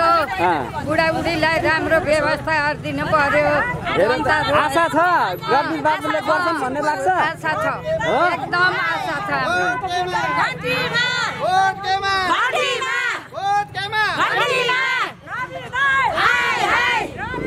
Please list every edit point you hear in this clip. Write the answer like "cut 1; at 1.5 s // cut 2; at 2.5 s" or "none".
none